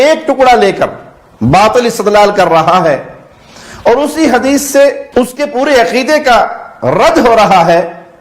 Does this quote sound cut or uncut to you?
cut